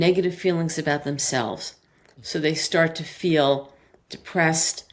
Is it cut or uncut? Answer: uncut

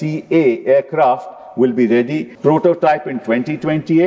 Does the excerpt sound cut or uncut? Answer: cut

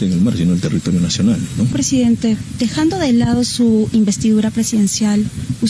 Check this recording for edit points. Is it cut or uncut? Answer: cut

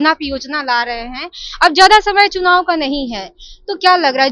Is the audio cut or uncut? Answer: uncut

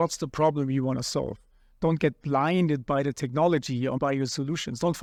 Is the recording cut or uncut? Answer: uncut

